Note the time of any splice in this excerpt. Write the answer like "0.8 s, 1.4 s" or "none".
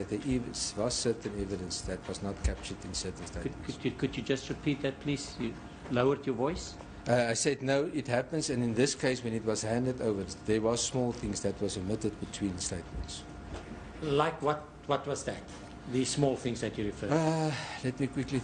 none